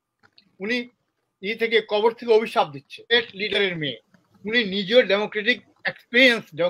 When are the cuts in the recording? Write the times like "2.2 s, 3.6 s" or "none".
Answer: 3.1 s